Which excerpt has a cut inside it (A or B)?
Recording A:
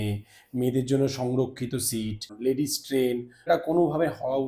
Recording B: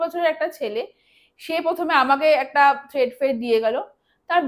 A